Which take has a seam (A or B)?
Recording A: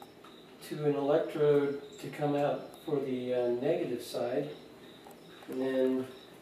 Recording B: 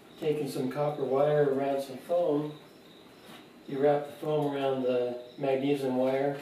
A